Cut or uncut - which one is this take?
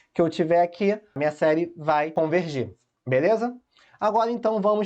cut